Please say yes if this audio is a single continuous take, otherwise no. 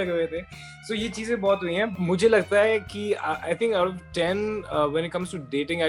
no